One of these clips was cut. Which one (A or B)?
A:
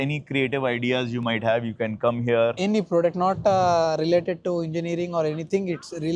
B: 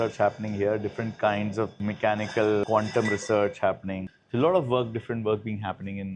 B